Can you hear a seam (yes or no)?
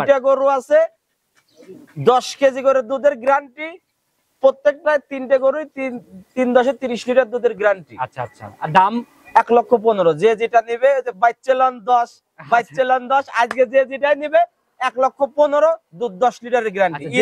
no